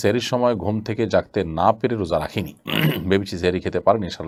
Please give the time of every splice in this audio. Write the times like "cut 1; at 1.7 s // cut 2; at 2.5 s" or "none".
none